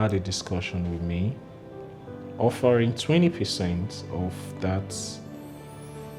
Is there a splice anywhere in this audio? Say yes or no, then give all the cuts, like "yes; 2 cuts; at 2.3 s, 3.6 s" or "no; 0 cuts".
no; 0 cuts